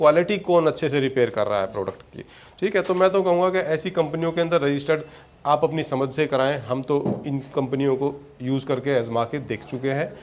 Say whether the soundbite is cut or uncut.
uncut